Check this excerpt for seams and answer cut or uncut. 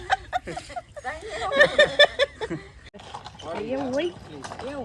cut